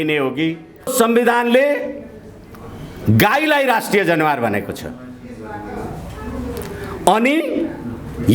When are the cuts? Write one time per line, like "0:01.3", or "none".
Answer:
0:00.9